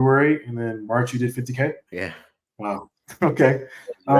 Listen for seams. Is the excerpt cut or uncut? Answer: uncut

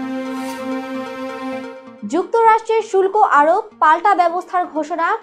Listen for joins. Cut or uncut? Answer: cut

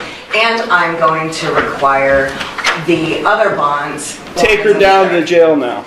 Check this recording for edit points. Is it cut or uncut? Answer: cut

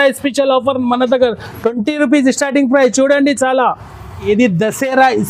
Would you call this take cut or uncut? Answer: cut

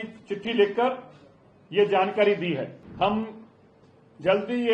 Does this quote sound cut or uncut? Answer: cut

